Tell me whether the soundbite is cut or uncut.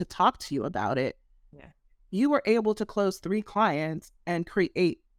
uncut